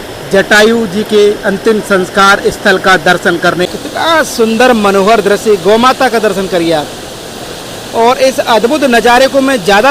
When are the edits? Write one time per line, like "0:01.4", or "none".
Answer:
0:03.6